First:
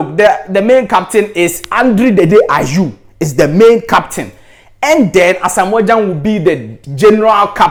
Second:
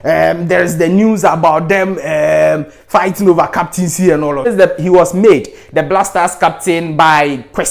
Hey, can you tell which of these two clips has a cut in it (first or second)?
second